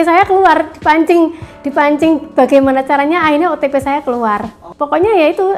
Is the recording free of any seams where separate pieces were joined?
yes; 0 cuts

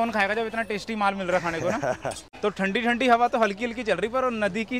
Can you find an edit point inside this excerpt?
yes; 1 cut; at 2.2 s

